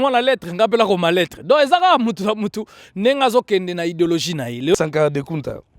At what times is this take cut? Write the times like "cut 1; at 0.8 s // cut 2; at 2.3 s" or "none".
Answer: cut 1; at 4.7 s